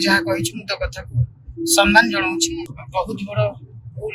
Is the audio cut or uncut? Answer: cut